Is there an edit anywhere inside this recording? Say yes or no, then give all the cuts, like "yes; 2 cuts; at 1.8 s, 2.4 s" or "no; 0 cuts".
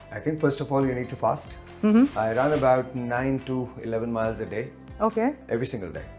yes; 1 cut; at 2.1 s